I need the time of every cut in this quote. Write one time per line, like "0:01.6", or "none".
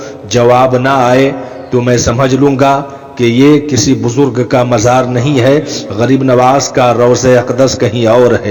none

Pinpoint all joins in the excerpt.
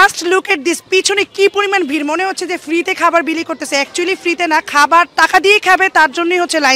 none

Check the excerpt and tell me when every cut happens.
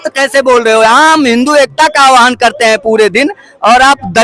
none

